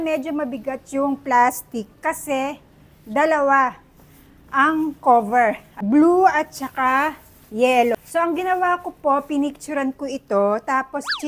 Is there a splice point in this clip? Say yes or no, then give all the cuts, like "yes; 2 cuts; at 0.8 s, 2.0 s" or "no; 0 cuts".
yes; 2 cuts; at 5.7 s, 7.9 s